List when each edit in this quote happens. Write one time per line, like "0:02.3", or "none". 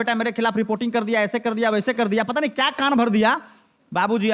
none